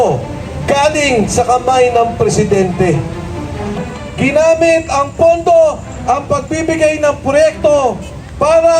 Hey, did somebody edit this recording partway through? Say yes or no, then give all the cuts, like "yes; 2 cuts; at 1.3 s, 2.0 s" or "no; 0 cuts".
yes; 1 cut; at 3.8 s